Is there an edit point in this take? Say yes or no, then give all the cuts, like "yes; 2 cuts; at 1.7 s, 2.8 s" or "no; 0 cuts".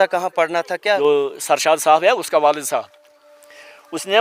yes; 1 cut; at 1.0 s